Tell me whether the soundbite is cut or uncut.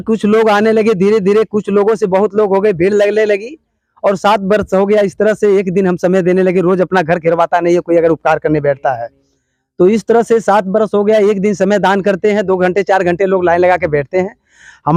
uncut